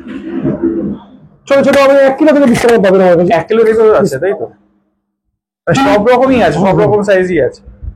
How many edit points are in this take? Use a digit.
0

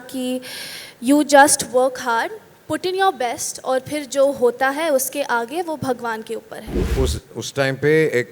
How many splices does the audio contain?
1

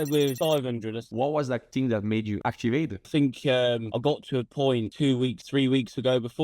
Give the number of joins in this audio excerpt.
1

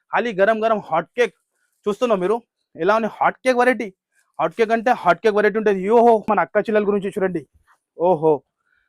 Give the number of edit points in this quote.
1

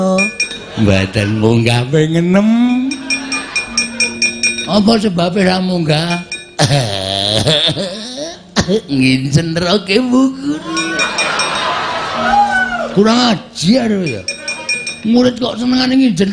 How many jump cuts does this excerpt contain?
0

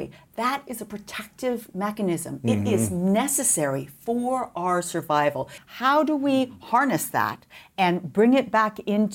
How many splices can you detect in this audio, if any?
1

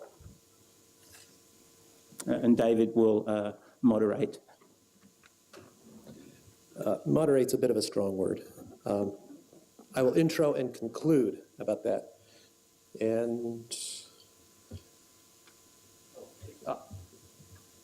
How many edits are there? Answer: 1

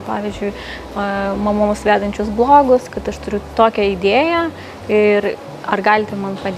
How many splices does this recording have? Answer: 1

